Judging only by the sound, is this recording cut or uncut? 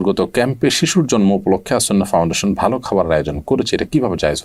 uncut